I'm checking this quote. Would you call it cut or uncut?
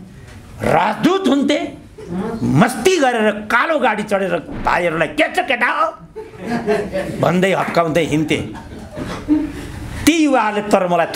uncut